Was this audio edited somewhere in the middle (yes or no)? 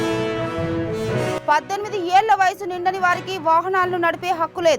no